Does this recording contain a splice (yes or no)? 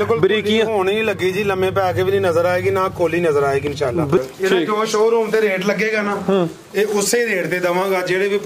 yes